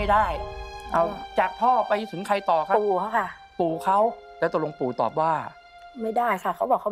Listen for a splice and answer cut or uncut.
cut